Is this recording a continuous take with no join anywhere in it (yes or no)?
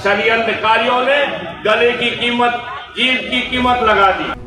yes